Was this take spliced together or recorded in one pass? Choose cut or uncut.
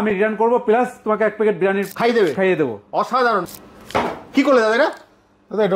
cut